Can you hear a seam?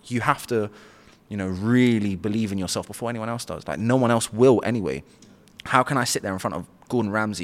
no; 0 cuts

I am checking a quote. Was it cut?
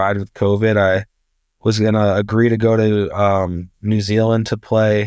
no; 0 cuts

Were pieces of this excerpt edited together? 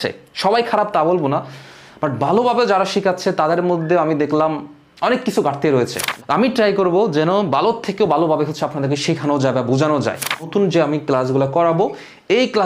yes; 2 cuts; at 6.0 s, 10.5 s

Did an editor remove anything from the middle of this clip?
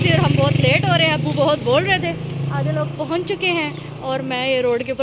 no; 0 cuts

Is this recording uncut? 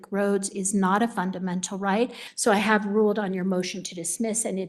no; 1 cut; at 2.2 s

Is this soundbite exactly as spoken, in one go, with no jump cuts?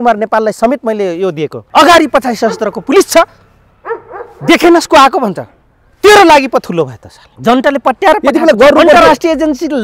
no; 2 cuts; at 1.5 s, 7.2 s

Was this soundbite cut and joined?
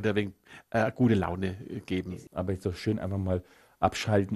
yes; 1 cut; at 2.0 s

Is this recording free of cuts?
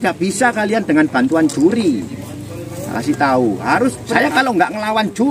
no; 1 cut; at 4.0 s

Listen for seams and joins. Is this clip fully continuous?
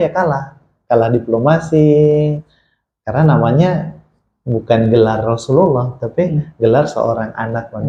yes; 0 cuts

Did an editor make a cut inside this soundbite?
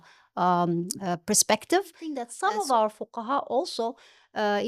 yes; 1 cut; at 2.3 s

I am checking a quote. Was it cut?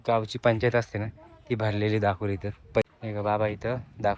yes; 1 cut; at 2.8 s

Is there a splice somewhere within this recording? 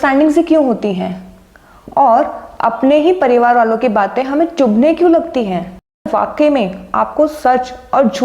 yes; 1 cut; at 6.1 s

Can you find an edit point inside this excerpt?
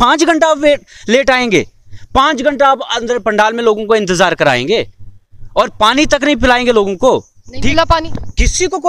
no; 0 cuts

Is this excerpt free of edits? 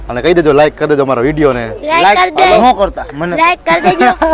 yes; 0 cuts

